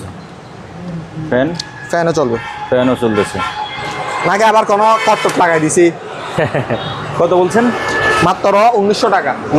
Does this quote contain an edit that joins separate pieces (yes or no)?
no